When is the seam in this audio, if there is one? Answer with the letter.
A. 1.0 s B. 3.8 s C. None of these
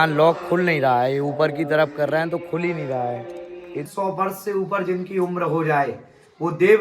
B